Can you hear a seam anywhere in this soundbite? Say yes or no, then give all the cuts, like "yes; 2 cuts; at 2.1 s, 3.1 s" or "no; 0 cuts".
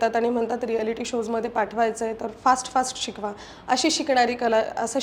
no; 0 cuts